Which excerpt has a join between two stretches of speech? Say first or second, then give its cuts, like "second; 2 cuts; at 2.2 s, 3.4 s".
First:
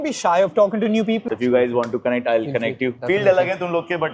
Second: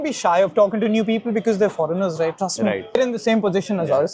first; 2 cuts; at 1.2 s, 3.0 s